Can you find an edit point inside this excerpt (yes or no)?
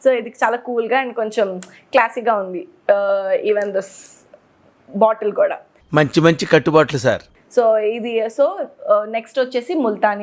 no